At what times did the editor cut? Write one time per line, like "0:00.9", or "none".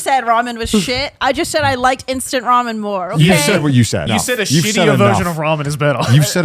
0:04.0